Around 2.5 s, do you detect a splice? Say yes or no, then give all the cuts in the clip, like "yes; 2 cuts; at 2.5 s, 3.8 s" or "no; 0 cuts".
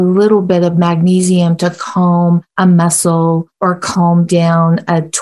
yes; 2 cuts; at 2.5 s, 3.5 s